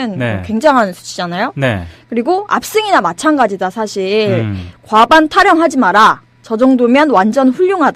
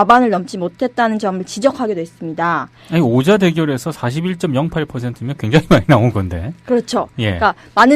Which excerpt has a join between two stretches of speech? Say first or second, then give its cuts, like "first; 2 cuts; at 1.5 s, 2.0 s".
second; 1 cut; at 6.1 s